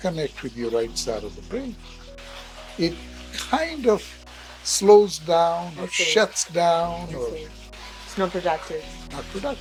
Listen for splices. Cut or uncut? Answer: uncut